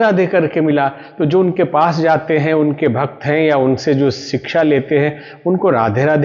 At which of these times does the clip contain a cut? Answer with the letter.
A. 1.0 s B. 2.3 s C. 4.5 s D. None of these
A